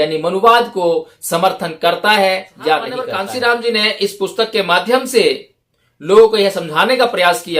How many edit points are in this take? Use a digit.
1